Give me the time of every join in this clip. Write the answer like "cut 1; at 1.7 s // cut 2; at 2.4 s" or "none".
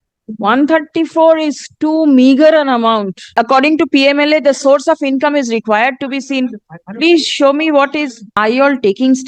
cut 1; at 3.3 s // cut 2; at 8.2 s